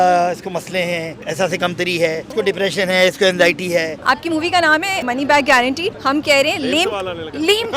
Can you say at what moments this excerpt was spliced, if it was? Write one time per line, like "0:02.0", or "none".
0:01.2
0:02.3
0:04.0
0:05.1
0:05.9